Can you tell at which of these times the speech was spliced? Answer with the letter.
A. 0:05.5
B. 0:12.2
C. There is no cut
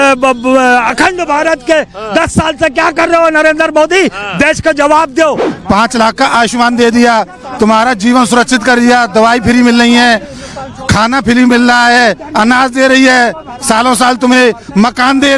A